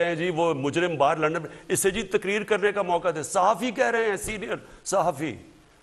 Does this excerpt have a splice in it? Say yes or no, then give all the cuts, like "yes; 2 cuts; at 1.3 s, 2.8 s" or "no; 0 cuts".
no; 0 cuts